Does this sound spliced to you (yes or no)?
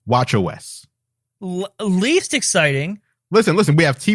no